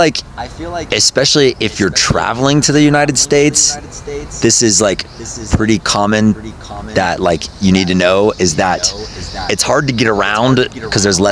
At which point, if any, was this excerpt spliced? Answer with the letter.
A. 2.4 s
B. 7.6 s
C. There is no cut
C